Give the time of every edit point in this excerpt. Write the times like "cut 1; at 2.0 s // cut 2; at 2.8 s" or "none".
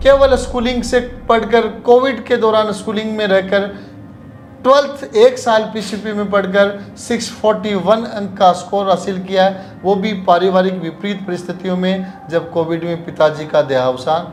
none